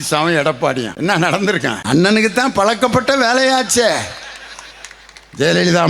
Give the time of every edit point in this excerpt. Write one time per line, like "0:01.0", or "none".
0:00.9
0:01.8